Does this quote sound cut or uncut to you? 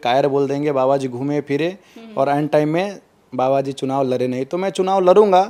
uncut